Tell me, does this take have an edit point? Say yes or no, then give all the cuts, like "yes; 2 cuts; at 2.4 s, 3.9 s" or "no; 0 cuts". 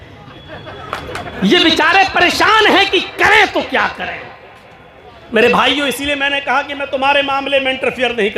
no; 0 cuts